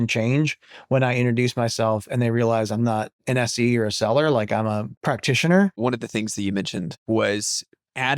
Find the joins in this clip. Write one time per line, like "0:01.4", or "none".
0:03.2
0:04.9
0:05.8
0:07.0